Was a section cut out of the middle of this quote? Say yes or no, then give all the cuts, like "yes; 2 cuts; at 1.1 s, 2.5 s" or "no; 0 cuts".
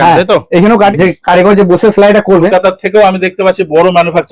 yes; 2 cuts; at 0.9 s, 2.5 s